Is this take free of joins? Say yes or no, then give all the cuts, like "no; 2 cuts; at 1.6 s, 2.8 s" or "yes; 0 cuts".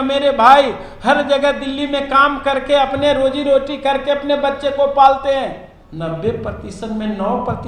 no; 1 cut; at 5.8 s